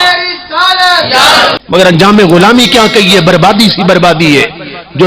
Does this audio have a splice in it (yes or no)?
yes